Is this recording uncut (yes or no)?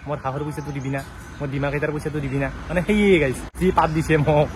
no